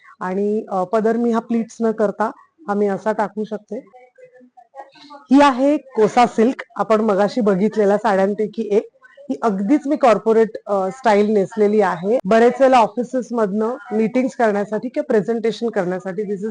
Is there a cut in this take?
yes; 2 cuts; at 4.0 s, 12.2 s

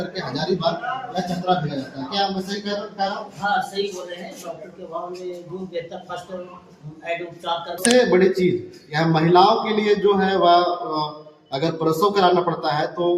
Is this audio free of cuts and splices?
no; 1 cut; at 7.8 s

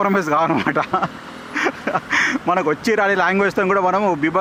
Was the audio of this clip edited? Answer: no; 0 cuts

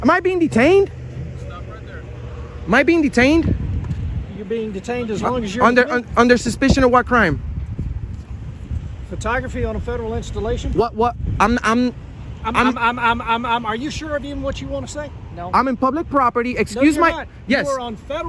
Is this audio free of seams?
yes; 0 cuts

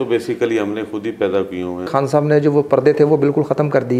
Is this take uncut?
no; 1 cut; at 1.9 s

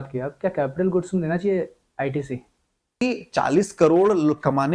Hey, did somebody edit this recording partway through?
yes; 1 cut; at 3.0 s

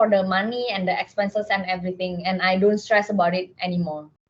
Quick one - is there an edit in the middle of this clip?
no; 0 cuts

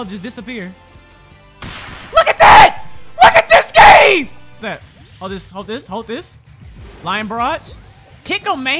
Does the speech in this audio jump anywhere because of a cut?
yes; 1 cut; at 4.5 s

